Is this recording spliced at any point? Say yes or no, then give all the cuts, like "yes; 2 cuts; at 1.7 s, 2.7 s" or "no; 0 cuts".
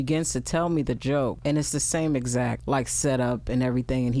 yes; 2 cuts; at 1.4 s, 2.6 s